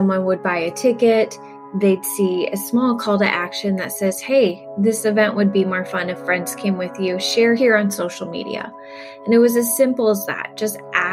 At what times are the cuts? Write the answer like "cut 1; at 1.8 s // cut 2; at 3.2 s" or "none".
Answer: cut 1; at 7.6 s